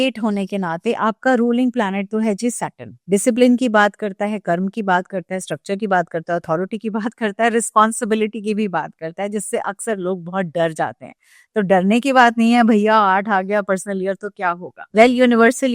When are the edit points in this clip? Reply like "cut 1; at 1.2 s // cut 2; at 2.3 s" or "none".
none